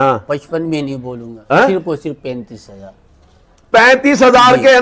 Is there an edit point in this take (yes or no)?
no